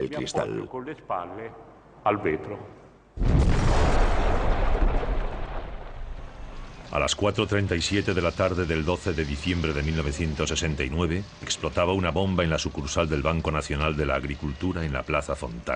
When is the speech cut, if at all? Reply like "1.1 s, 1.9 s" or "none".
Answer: 0.9 s